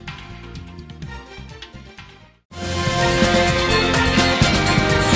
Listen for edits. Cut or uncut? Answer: uncut